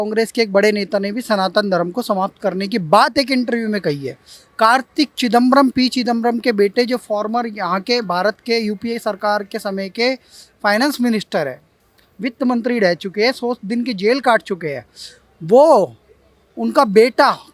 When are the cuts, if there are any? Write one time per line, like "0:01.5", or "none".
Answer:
none